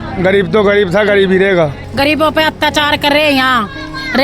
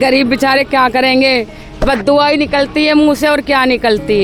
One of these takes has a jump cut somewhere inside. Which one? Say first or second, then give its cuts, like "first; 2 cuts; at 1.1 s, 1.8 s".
first; 1 cut; at 1.8 s